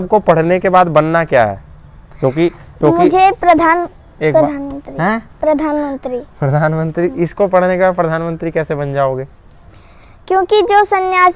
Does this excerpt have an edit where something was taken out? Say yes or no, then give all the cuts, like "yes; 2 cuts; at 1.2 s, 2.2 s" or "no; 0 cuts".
no; 0 cuts